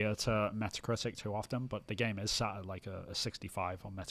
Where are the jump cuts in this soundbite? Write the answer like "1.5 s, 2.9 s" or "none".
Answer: none